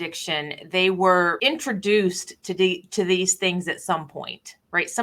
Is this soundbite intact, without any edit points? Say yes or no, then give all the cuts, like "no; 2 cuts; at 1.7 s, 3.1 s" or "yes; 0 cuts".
no; 1 cut; at 1.4 s